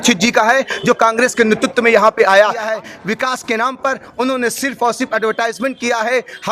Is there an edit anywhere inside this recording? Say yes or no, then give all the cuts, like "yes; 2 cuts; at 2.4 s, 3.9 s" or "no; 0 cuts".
yes; 1 cut; at 2.6 s